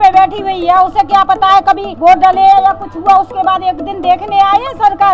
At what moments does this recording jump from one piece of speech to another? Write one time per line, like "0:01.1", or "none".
none